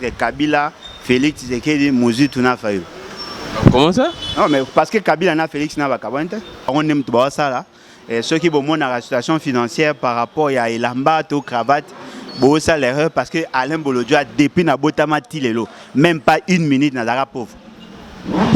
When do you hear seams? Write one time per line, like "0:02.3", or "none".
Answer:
0:06.7